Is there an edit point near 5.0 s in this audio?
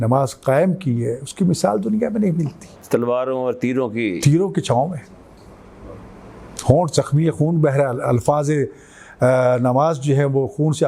no; 0 cuts

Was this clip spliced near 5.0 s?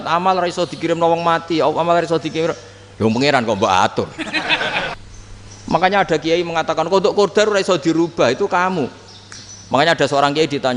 yes; 1 cut; at 5.0 s

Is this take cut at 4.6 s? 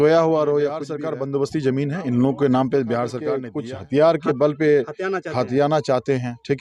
no; 2 cuts; at 1.0 s, 3.4 s

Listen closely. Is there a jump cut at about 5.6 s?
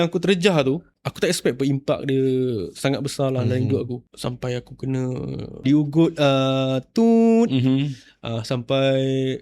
yes; 3 cuts; at 1.0 s, 4.1 s, 5.6 s

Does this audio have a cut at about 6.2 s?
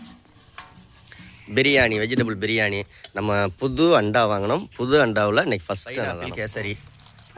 yes; 1 cut; at 6.2 s

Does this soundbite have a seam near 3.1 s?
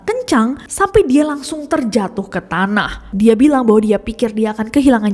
yes; 1 cut; at 3.1 s

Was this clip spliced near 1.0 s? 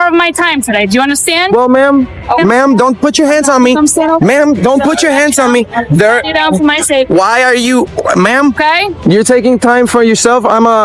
no; 2 cuts; at 2.4 s, 8.6 s

